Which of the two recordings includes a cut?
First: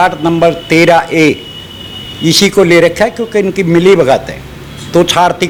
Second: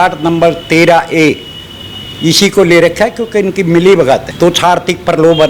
second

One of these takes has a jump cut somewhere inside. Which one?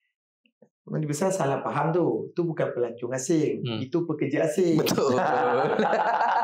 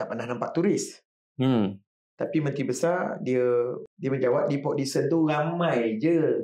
second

